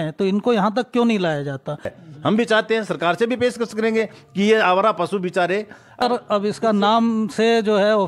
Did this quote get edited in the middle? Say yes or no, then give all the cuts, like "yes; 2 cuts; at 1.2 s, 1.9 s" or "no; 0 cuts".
yes; 2 cuts; at 2.0 s, 6.0 s